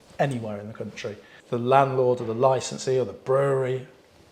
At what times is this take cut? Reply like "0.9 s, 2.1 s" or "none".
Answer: 1.3 s